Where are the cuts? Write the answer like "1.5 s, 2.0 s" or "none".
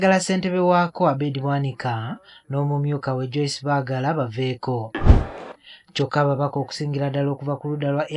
5.0 s